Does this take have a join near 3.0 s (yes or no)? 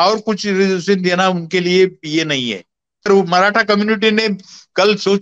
yes